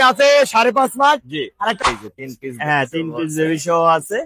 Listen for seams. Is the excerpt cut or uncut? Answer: cut